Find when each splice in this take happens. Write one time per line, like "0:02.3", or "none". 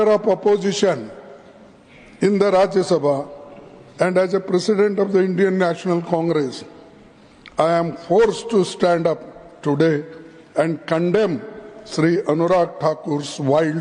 none